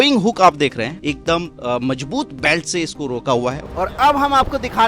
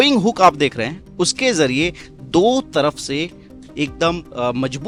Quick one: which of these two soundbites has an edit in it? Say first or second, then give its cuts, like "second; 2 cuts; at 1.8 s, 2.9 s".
first; 2 cuts; at 0.9 s, 3.7 s